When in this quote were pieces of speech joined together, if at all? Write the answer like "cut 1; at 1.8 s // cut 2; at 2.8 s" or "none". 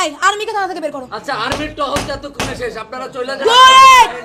none